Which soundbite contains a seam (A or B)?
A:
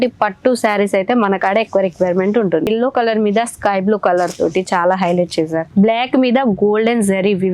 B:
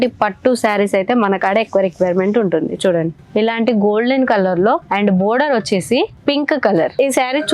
A